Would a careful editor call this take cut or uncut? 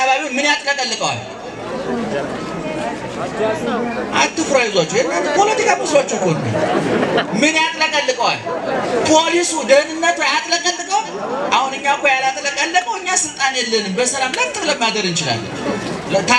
uncut